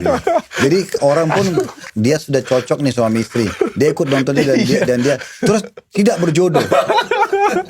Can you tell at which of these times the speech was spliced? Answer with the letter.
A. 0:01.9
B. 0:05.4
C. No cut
A